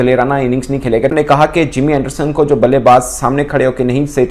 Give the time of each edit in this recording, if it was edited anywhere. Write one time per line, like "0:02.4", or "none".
0:01.0